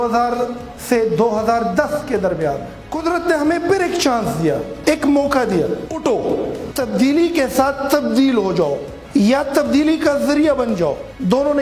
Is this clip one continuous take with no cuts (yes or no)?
yes